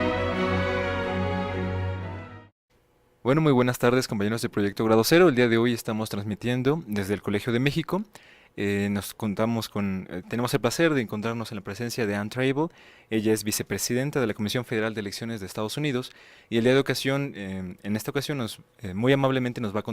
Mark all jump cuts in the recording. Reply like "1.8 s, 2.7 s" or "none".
18.5 s